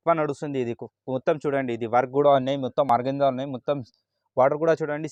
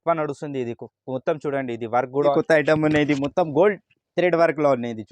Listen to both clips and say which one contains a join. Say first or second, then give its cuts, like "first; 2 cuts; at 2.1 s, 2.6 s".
second; 1 cut; at 2.3 s